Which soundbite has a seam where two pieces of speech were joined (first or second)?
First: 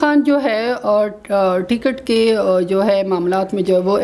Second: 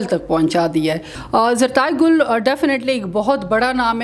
second